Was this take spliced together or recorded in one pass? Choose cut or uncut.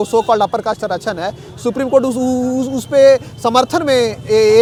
uncut